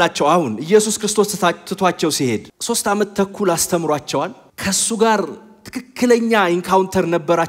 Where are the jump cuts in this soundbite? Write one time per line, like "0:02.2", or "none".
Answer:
0:04.4